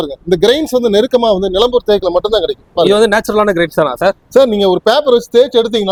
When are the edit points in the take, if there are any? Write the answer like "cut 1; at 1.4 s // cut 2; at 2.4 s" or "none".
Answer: none